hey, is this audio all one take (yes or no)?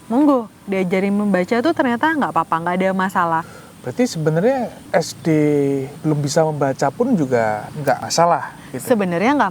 no